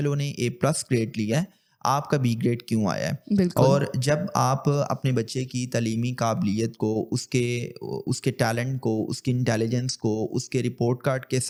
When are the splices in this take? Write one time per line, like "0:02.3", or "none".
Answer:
none